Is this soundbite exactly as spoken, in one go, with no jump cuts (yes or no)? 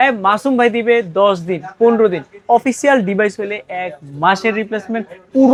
yes